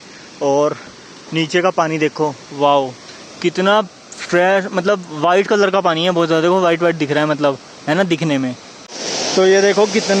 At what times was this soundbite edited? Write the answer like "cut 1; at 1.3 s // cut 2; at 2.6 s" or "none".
cut 1; at 9.0 s